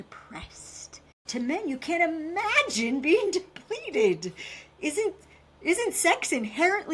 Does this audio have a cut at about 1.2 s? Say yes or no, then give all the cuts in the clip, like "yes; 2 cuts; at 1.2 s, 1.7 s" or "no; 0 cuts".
yes; 1 cut; at 1.2 s